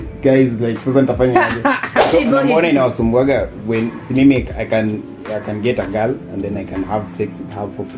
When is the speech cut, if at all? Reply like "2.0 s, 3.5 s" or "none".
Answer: 1.9 s